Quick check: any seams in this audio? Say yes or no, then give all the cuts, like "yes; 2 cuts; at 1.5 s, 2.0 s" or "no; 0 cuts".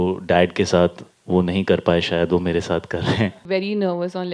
yes; 1 cut; at 3.4 s